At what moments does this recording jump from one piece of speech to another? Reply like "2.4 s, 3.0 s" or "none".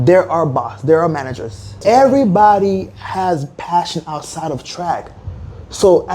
1.8 s